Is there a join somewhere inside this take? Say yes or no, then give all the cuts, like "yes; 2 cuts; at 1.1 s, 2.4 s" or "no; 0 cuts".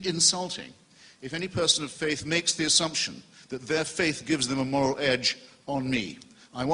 no; 0 cuts